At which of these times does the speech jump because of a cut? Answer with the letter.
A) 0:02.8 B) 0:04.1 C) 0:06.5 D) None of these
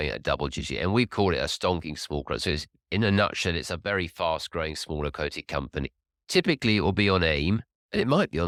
D